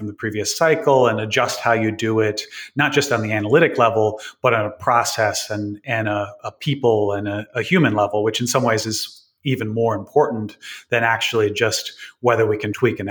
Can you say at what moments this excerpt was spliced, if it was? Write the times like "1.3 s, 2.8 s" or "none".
none